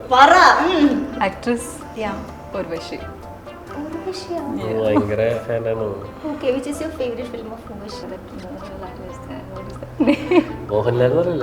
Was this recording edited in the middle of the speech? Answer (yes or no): yes